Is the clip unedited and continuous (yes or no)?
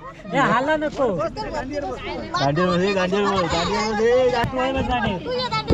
no